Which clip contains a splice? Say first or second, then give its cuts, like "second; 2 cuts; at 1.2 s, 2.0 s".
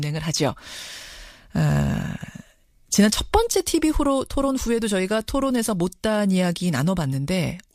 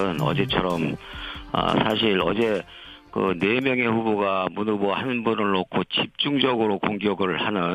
second; 1 cut; at 6.8 s